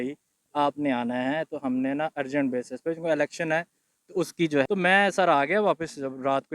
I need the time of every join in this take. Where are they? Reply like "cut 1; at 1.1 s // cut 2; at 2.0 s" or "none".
cut 1; at 4.7 s

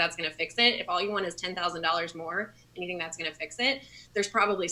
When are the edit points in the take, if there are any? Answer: none

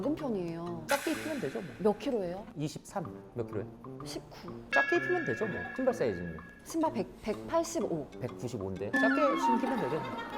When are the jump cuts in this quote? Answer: cut 1; at 0.8 s // cut 2; at 3.2 s

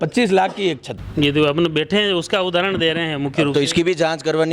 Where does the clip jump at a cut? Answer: none

